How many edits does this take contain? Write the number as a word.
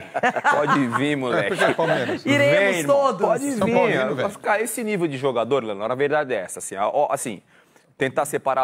zero